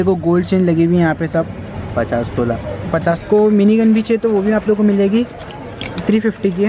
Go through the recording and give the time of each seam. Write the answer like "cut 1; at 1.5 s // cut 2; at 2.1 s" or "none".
cut 1; at 3.2 s